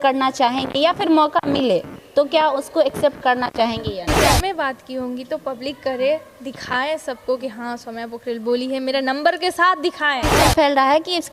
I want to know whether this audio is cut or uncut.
cut